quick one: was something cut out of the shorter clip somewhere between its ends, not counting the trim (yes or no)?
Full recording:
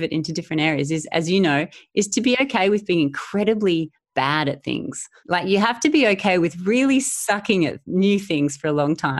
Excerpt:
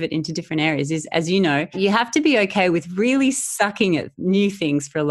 yes